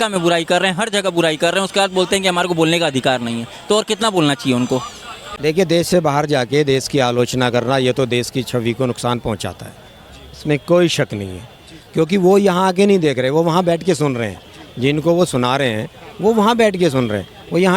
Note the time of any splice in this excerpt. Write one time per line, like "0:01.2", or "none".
0:05.3